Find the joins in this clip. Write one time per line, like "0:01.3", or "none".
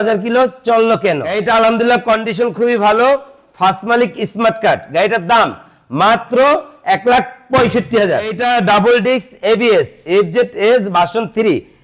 0:01.3
0:08.4